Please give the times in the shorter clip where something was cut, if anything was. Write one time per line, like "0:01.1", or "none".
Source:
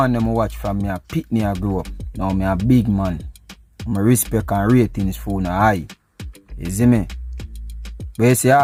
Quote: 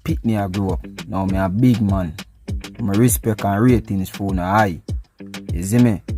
none